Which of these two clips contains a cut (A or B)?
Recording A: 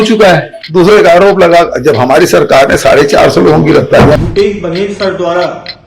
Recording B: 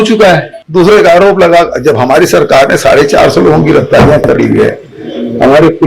A